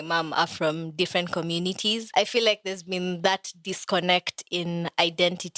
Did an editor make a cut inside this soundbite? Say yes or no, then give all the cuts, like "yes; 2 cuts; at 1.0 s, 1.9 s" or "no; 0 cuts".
yes; 1 cut; at 2.1 s